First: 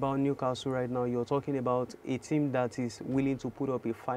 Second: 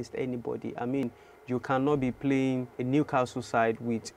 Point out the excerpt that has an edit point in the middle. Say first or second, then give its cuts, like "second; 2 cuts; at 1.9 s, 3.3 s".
second; 2 cuts; at 1.0 s, 2.7 s